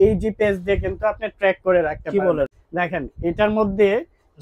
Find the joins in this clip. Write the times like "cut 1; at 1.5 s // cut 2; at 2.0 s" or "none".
cut 1; at 2.6 s